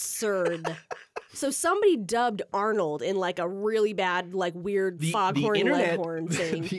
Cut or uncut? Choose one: cut